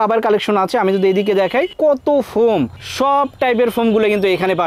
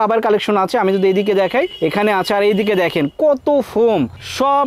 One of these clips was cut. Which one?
first; 1 cut; at 1.7 s

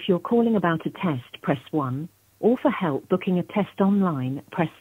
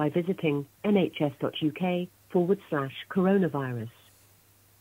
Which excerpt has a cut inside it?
second; 1 cut; at 2.2 s

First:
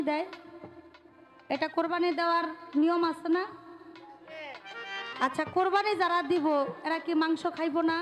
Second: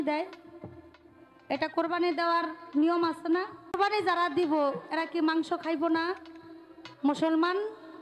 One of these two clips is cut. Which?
second; 1 cut; at 3.8 s

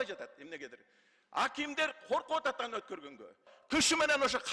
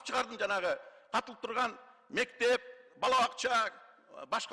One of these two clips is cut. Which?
first; 1 cut; at 3.5 s

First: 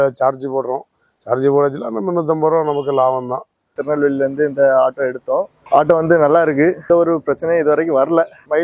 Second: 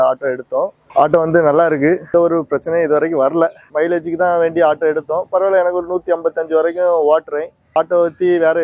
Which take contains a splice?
first; 1 cut; at 3.7 s

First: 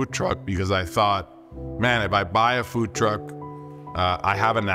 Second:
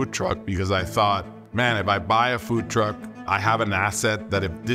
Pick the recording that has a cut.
second; 2 cuts; at 1.4 s, 3.2 s

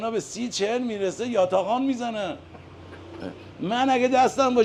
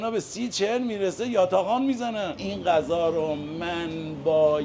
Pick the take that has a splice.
second; 1 cut; at 2.4 s

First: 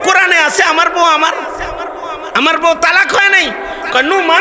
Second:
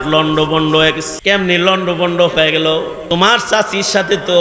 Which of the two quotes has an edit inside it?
second; 2 cuts; at 1.1 s, 3.0 s

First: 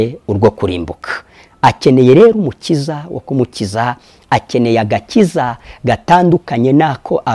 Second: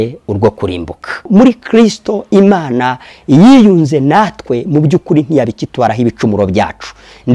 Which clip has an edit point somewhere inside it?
second; 1 cut; at 1.3 s

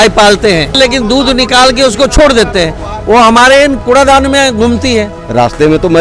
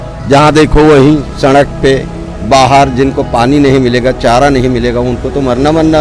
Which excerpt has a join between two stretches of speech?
first; 2 cuts; at 3.8 s, 5.1 s

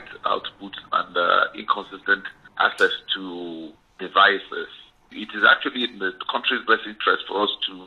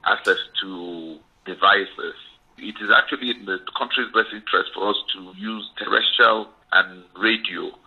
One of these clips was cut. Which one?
second; 1 cut; at 6.6 s

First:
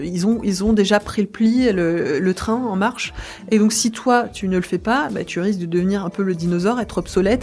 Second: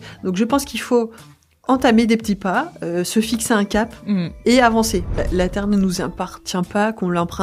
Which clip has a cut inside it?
second; 2 cuts; at 1.5 s, 5.1 s

